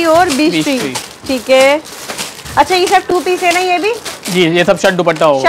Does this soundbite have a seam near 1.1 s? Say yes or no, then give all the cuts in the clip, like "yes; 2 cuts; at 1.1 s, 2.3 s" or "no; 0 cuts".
no; 0 cuts